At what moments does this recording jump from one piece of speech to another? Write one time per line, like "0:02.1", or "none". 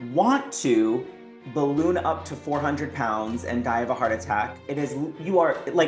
none